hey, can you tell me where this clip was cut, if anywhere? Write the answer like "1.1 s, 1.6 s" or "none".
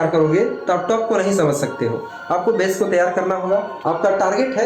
3.7 s